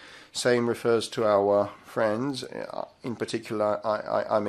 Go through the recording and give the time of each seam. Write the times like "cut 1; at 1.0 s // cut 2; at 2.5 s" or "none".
none